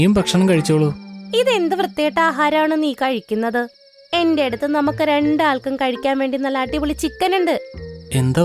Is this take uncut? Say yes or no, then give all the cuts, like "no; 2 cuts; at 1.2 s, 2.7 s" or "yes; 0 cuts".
yes; 0 cuts